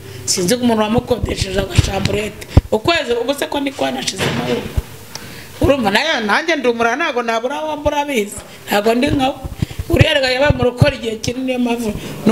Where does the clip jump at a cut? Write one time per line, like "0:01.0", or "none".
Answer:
none

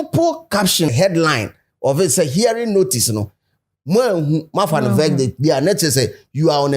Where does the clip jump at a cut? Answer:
0:00.9

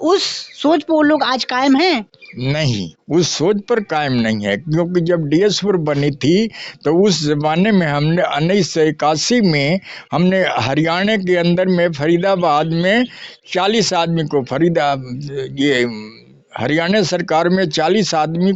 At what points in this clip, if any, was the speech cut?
none

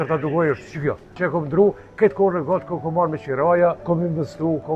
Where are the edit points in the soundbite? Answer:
0:01.1
0:03.8

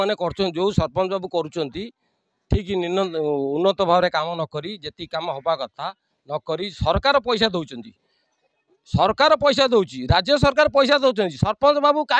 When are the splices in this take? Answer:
none

